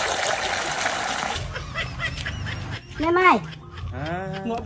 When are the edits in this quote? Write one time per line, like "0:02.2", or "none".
0:01.4

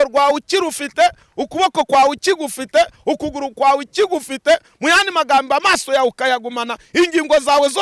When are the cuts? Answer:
none

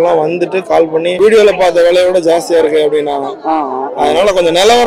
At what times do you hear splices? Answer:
0:01.1

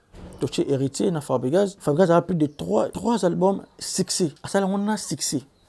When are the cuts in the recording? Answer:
0:01.8
0:02.9
0:04.4

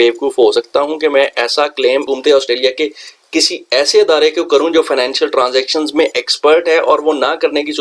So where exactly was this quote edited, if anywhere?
none

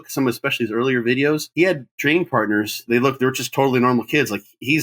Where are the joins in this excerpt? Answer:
0:01.5
0:02.8

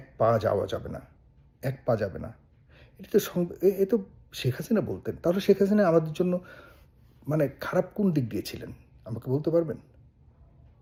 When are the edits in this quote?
none

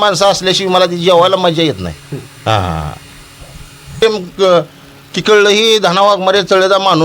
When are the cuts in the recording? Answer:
0:04.0

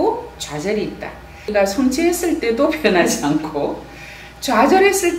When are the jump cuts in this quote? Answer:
0:01.5

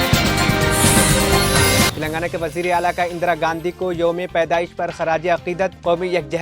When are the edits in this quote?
0:01.9

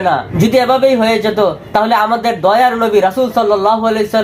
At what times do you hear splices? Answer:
none

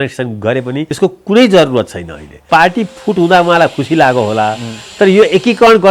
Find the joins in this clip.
0:00.9
0:02.4

